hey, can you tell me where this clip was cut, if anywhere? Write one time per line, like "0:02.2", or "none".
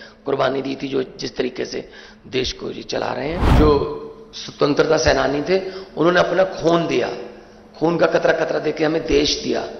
0:03.5

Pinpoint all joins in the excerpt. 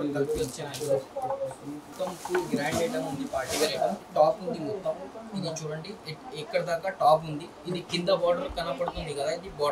0:02.0
0:04.0

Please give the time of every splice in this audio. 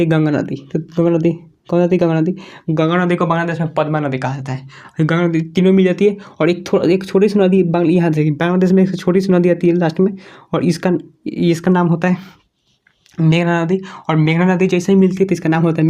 none

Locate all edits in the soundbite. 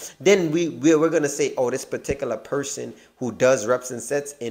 none

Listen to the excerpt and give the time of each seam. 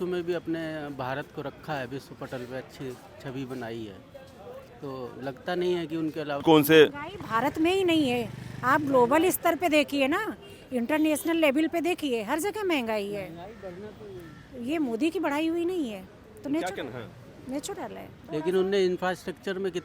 0:06.4
0:18.2

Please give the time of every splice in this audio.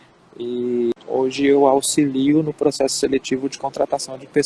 0:00.9

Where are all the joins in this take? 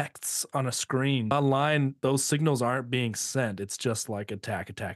0:01.3
0:01.9

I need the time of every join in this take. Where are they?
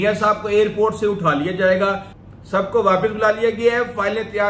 0:02.1

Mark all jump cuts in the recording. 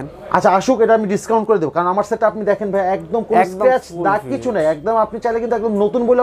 none

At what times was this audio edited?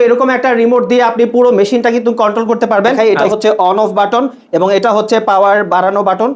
0:03.0

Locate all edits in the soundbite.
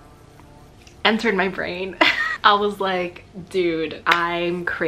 0:02.2
0:04.0

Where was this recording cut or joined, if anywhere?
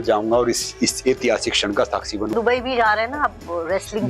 0:02.3

